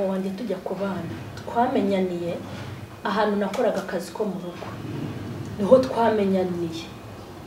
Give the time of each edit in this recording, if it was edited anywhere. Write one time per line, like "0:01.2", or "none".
none